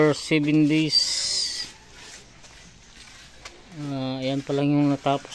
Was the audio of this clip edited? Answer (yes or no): no